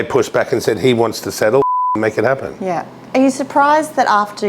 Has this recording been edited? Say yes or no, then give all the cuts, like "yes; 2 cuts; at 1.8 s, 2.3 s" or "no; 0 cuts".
no; 0 cuts